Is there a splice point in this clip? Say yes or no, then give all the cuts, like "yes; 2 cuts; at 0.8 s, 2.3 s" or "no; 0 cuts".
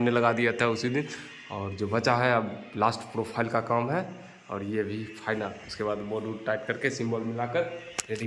no; 0 cuts